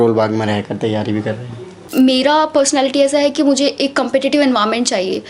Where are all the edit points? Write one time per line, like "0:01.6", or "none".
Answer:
0:01.8

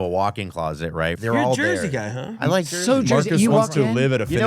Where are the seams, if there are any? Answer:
0:01.2

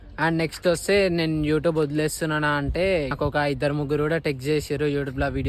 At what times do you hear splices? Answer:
0:03.1

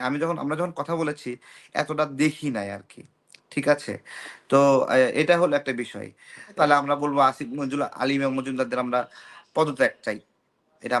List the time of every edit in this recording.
0:06.5

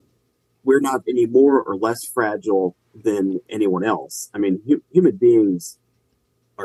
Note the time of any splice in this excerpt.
none

